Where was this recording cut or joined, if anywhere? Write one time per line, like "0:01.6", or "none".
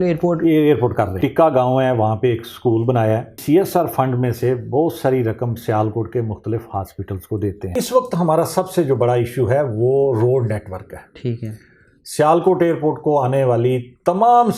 0:01.1
0:03.4
0:07.8